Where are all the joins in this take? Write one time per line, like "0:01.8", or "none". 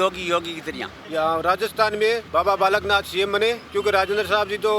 0:00.9
0:02.2
0:03.6